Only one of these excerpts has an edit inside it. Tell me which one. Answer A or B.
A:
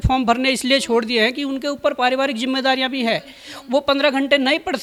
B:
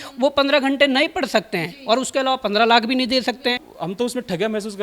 B